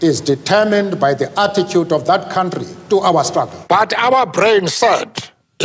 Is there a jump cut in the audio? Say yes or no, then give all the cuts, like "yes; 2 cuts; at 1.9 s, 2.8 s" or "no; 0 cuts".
yes; 1 cut; at 3.6 s